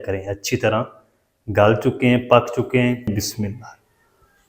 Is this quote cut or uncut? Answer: cut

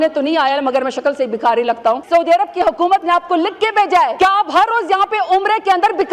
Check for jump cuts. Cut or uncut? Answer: cut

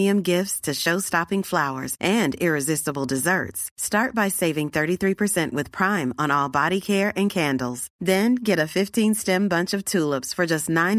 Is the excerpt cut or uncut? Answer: uncut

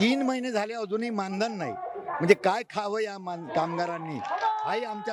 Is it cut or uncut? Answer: uncut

